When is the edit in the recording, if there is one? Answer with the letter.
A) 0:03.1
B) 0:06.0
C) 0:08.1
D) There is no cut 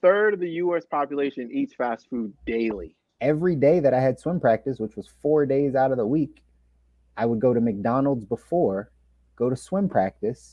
A